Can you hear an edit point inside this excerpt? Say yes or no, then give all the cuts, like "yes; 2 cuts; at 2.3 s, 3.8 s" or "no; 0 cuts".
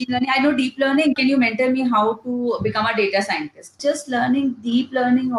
yes; 2 cuts; at 1.2 s, 3.8 s